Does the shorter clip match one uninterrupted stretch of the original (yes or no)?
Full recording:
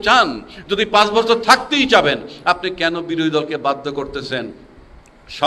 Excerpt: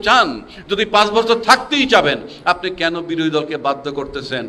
yes